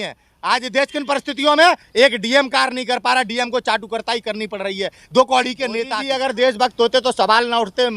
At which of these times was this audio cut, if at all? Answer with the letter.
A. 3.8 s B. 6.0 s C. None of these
B